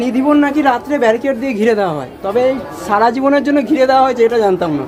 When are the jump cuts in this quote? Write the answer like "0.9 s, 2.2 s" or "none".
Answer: none